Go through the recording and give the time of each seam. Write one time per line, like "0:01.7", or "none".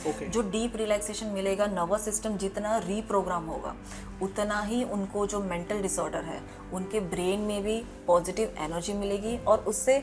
none